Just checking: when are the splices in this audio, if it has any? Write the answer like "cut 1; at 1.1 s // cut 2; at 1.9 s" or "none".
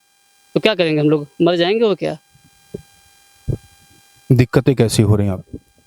none

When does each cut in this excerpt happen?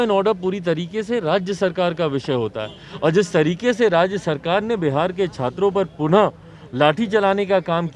none

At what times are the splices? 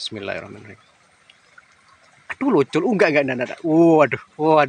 none

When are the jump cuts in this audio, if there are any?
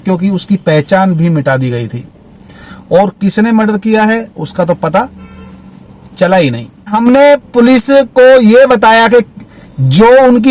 cut 1; at 6.9 s

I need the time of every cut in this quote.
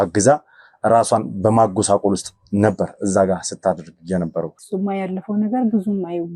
cut 1; at 4.6 s

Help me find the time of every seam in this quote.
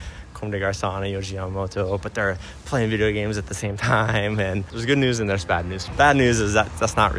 cut 1; at 4.7 s // cut 2; at 5.8 s

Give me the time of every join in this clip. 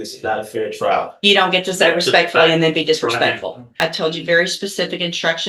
cut 1; at 3.8 s

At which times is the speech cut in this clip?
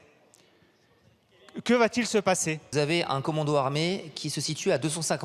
cut 1; at 2.7 s

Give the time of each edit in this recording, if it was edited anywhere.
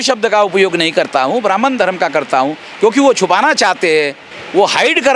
none

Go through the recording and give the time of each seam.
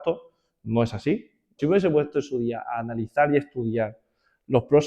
cut 1; at 1.6 s

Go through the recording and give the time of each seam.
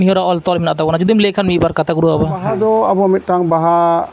cut 1; at 2.5 s

